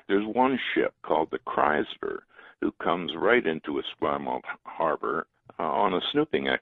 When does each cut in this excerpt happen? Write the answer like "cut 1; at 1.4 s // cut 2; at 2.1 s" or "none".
cut 1; at 1.0 s // cut 2; at 5.3 s